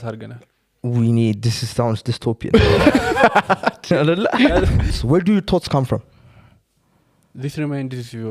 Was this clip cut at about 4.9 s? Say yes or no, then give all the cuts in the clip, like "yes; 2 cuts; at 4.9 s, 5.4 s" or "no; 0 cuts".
yes; 1 cut; at 4.9 s